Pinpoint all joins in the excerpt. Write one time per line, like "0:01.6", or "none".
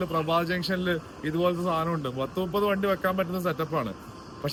none